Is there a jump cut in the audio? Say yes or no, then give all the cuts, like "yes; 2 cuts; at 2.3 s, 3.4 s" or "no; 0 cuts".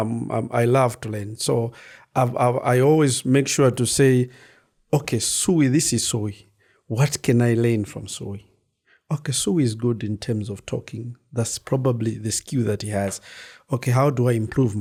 no; 0 cuts